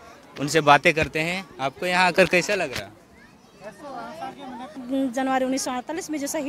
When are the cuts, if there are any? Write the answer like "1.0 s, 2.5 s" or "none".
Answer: 4.8 s

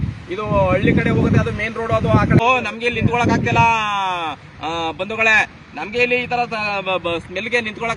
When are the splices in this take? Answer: 2.4 s

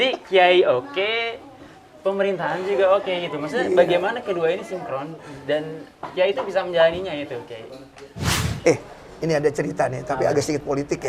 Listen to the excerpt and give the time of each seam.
8.3 s

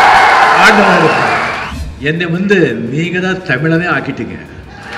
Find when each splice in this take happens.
1.6 s

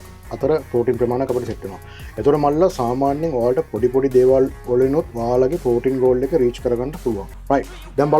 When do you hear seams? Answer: 7.3 s

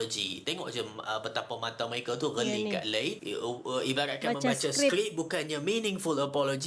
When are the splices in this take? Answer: none

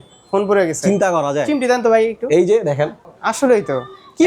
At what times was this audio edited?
3.1 s

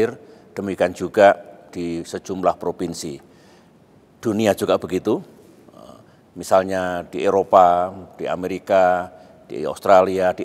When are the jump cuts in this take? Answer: 7.6 s

